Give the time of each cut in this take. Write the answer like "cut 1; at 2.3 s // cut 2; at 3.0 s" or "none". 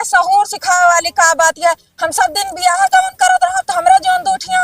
none

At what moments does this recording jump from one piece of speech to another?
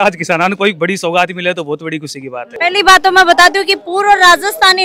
none

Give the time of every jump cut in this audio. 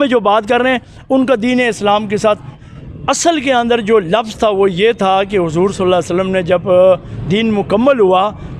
cut 1; at 2.6 s

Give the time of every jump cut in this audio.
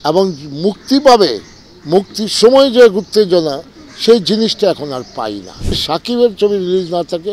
cut 1; at 5.8 s

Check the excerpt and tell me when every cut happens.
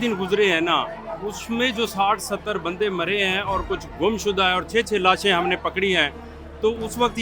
none

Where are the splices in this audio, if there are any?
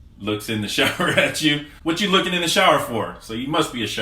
cut 1; at 1.7 s

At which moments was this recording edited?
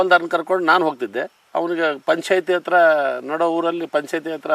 none

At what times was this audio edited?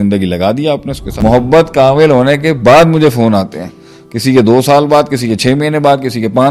cut 1; at 1.0 s

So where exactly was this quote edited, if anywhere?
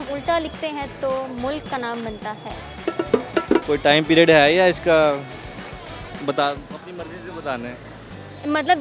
none

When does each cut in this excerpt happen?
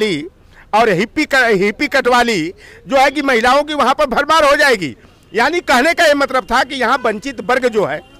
none

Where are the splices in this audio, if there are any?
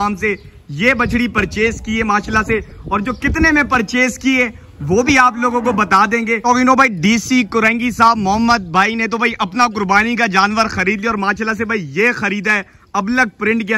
cut 1; at 6.4 s

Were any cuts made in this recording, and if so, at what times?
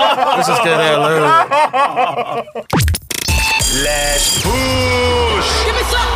cut 1; at 2.7 s

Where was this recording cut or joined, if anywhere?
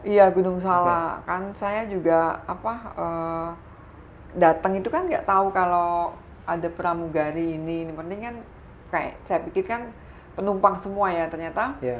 none

